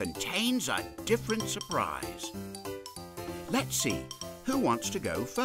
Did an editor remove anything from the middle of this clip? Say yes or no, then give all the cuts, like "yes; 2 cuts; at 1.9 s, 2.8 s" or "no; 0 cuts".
yes; 2 cuts; at 0.9 s, 3.5 s